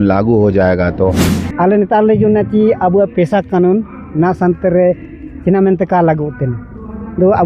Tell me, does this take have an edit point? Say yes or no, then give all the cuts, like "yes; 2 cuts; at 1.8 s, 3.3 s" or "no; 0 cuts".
yes; 1 cut; at 1.3 s